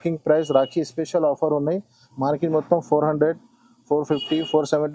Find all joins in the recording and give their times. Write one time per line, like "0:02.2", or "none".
none